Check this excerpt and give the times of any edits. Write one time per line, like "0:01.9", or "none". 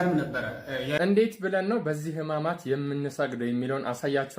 0:01.0